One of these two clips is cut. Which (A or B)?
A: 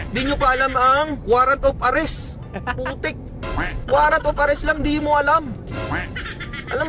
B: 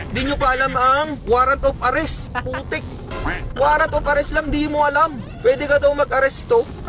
B